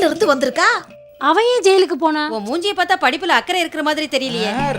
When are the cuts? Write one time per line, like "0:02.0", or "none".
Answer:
0:02.3